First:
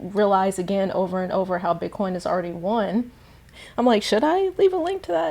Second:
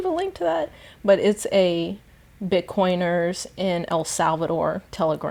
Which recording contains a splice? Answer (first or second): first